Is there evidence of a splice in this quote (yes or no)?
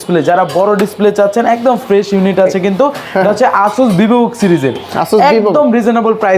no